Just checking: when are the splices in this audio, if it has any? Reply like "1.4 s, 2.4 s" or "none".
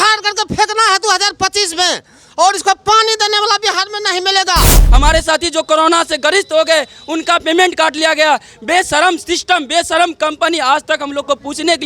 4.8 s